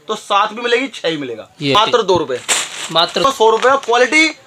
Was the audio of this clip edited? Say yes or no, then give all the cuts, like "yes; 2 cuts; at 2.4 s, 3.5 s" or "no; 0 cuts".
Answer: yes; 2 cuts; at 1.7 s, 3.2 s